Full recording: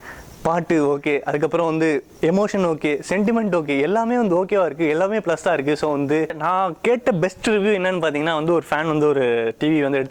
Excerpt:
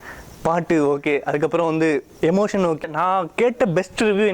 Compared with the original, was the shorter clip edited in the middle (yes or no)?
yes